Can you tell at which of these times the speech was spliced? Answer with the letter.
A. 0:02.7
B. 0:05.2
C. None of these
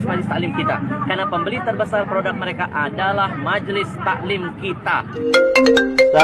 B